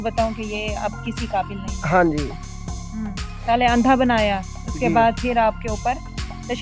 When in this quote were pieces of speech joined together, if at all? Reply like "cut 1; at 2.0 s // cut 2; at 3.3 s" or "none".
none